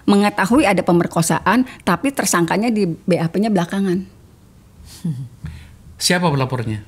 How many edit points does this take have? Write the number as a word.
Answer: zero